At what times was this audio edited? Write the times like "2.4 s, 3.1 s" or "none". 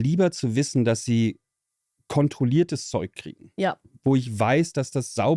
none